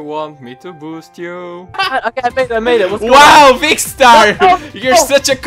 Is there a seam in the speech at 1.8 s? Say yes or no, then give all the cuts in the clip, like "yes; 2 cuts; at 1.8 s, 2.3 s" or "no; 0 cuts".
yes; 1 cut; at 1.8 s